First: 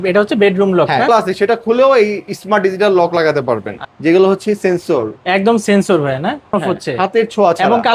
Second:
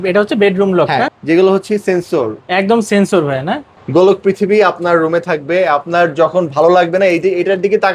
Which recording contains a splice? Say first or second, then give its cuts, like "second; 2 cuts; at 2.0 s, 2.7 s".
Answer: second; 2 cuts; at 1.0 s, 3.7 s